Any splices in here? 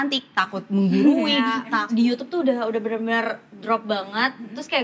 yes; 1 cut; at 1.7 s

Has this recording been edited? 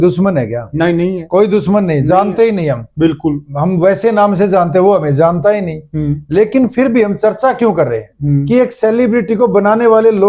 no; 0 cuts

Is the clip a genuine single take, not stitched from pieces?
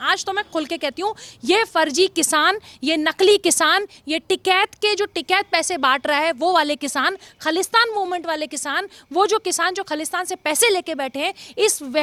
yes; 0 cuts

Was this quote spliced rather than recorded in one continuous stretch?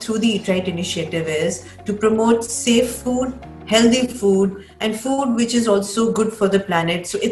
no; 0 cuts

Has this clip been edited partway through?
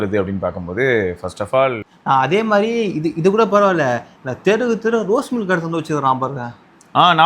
yes; 1 cut; at 1.8 s

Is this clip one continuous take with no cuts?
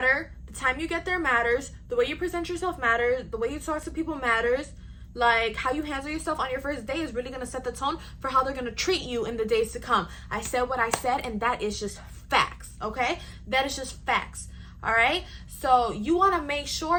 yes; 0 cuts

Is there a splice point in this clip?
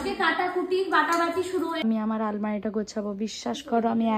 yes; 1 cut; at 1.8 s

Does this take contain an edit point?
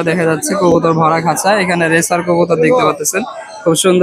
no; 0 cuts

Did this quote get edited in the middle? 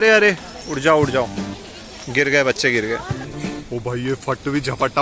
yes; 1 cut; at 3.3 s

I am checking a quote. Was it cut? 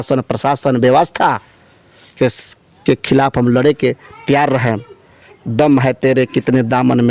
no; 0 cuts

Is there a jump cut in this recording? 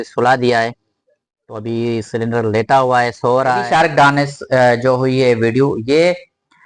yes; 1 cut; at 3.6 s

